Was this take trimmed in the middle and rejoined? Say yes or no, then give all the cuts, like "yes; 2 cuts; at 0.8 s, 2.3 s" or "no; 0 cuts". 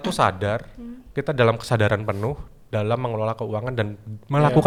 no; 0 cuts